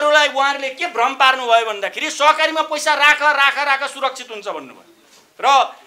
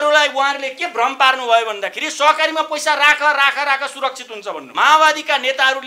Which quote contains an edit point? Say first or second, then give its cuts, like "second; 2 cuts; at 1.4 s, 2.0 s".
second; 1 cut; at 4.6 s